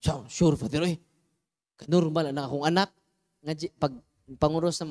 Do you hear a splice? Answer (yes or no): yes